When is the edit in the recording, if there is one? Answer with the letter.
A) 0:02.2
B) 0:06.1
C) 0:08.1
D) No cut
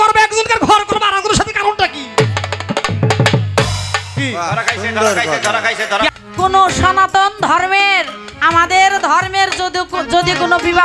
B